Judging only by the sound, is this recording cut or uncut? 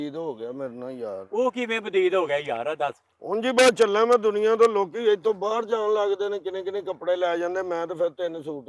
cut